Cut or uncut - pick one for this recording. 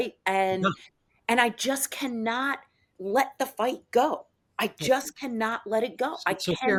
uncut